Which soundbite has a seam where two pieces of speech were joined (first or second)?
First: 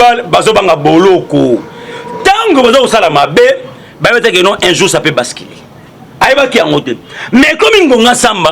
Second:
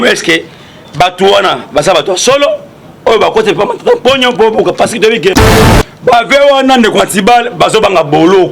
second